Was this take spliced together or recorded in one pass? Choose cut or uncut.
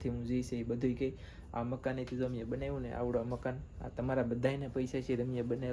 uncut